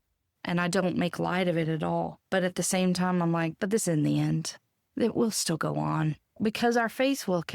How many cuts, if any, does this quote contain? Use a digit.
1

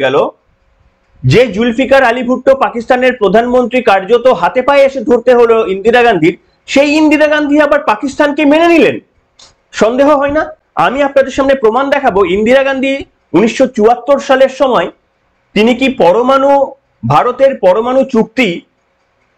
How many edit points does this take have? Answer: 0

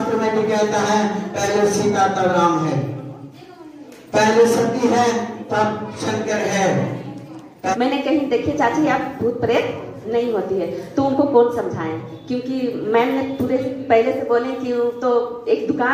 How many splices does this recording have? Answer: 1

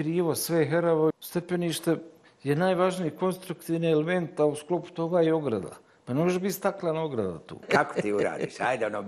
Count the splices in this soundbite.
2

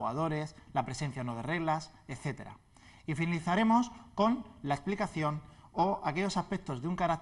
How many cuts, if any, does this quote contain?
1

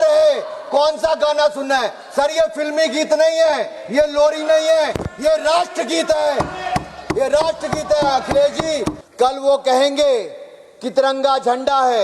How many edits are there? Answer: 1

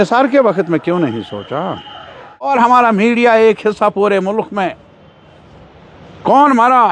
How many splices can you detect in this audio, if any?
1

